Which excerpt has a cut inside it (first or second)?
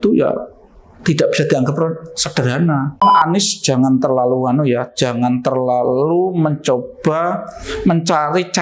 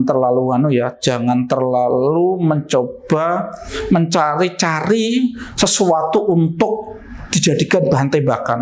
first